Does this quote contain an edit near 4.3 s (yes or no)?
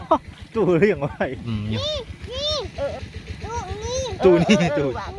no